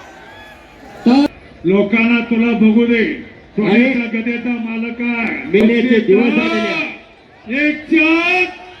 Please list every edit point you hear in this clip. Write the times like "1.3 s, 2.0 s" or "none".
1.3 s, 5.6 s

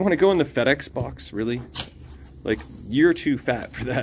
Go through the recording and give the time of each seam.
none

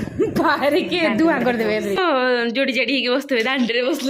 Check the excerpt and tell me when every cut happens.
2.0 s

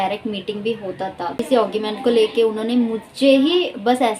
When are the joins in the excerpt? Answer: 1.4 s

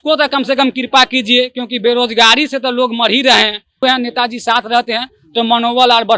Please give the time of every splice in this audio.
3.8 s

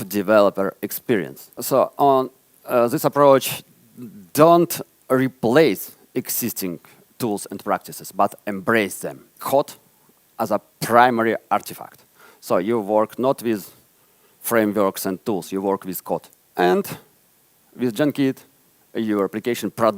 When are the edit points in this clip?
1.5 s, 9.3 s, 16.4 s

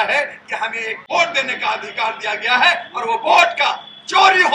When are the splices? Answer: 0.9 s

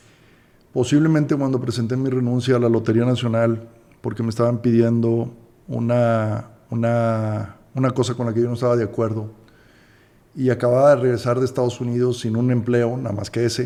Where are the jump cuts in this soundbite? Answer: none

